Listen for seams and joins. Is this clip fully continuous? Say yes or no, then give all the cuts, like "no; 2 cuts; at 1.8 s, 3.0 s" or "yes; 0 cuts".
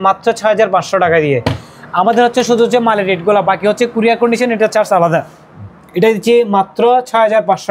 yes; 0 cuts